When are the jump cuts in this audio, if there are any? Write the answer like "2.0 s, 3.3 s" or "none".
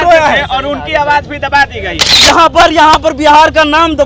2.1 s